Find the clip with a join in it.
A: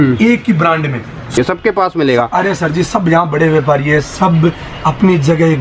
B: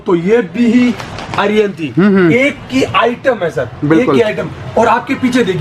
A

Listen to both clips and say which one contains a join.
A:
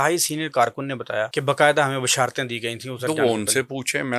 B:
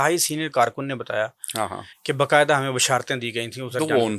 A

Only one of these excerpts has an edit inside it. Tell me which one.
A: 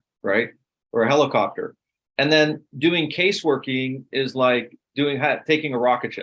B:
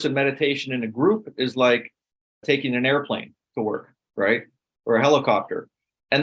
B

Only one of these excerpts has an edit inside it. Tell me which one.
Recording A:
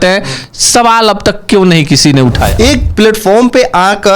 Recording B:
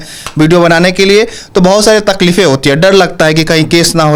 A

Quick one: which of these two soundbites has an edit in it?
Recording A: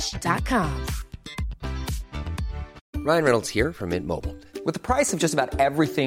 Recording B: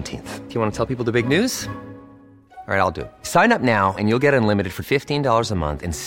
A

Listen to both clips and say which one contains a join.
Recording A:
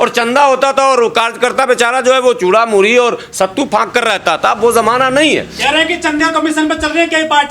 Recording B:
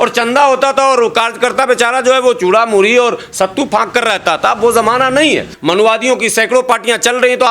B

